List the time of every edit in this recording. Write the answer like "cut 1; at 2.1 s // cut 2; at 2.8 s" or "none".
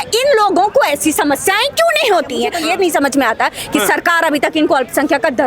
cut 1; at 2.5 s